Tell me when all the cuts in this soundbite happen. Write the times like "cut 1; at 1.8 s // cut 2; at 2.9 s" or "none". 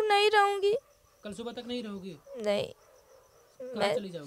none